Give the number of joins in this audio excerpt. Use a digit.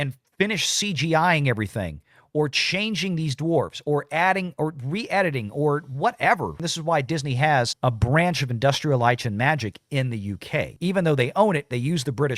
1